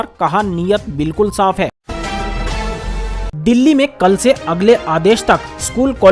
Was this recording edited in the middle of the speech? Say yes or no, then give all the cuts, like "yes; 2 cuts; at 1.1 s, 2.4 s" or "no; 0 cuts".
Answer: yes; 2 cuts; at 1.8 s, 3.1 s